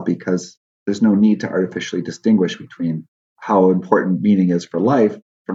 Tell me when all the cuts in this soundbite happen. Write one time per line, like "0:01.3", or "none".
none